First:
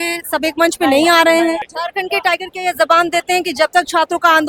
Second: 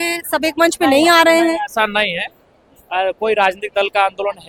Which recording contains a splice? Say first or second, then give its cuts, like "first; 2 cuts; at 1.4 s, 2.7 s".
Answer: first; 1 cut; at 1.7 s